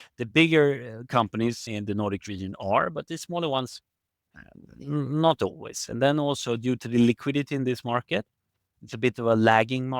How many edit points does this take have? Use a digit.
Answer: 1